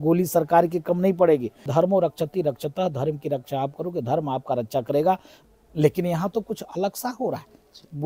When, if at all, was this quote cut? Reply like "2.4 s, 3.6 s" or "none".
1.6 s, 5.3 s